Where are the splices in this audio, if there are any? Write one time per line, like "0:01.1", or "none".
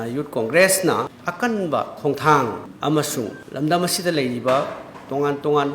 0:01.2
0:02.7